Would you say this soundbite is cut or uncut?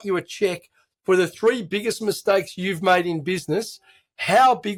uncut